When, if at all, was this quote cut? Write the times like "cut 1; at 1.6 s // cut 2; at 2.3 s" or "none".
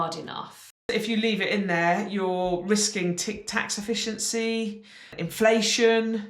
cut 1; at 0.9 s // cut 2; at 5.1 s